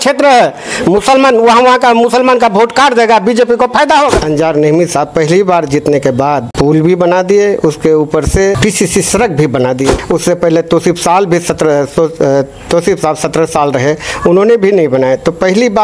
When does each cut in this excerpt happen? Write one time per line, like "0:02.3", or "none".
0:04.2
0:06.5
0:08.6
0:10.0